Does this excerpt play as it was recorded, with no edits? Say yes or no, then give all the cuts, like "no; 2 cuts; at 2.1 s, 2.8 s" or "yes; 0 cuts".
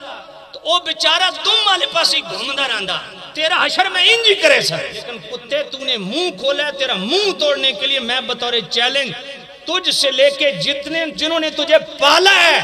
no; 1 cut; at 5.3 s